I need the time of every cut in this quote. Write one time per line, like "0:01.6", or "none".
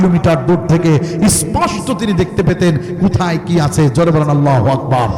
none